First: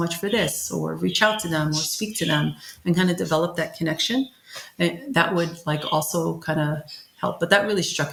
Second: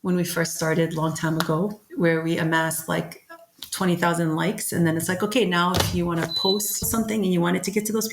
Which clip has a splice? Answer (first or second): second